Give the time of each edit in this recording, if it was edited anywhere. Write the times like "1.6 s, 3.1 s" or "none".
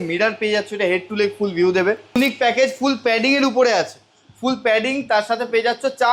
2.2 s